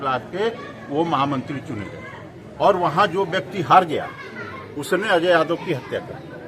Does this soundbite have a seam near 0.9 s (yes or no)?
no